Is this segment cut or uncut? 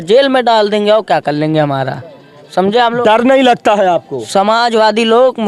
uncut